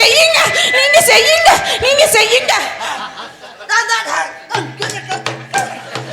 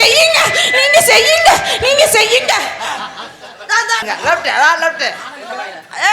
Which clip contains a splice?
second; 1 cut; at 4.0 s

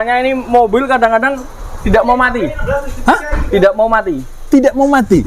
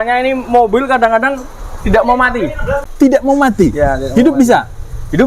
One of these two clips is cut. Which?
second; 1 cut; at 2.9 s

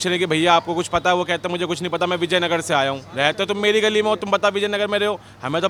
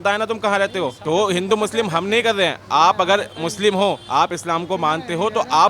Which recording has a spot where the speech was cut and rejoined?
second; 2 cuts; at 1.0 s, 4.0 s

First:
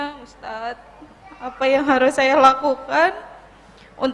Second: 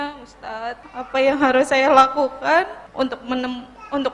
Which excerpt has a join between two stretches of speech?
second; 2 cuts; at 0.8 s, 2.8 s

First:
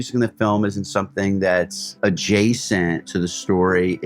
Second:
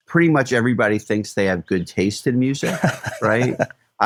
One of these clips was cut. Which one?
first; 2 cuts; at 1.8 s, 3.1 s

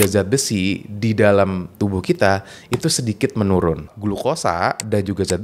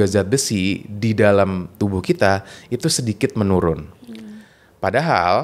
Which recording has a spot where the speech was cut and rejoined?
first; 1 cut; at 3.9 s

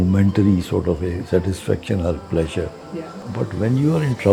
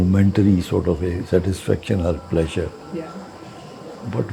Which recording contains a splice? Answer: first; 1 cut; at 3.2 s

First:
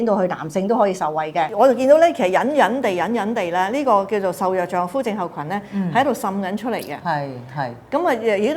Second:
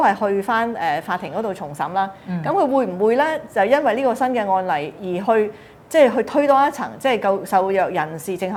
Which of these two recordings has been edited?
first; 1 cut; at 1.5 s

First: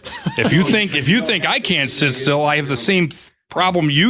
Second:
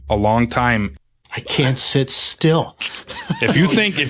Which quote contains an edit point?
second; 1 cut; at 0.9 s

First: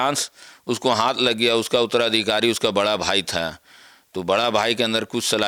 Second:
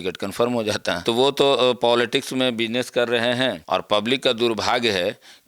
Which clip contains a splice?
second; 2 cuts; at 1.0 s, 3.6 s

